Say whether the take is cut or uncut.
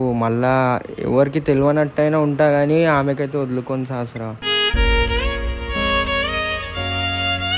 uncut